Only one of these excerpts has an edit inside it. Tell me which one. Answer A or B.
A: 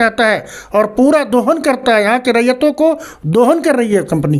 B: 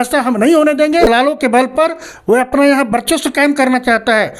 B